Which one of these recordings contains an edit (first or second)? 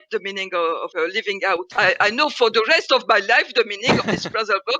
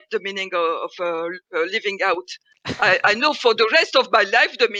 first